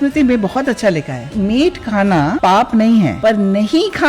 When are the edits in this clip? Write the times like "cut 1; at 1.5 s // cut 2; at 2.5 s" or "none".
cut 1; at 1.3 s // cut 2; at 2.4 s // cut 3; at 3.2 s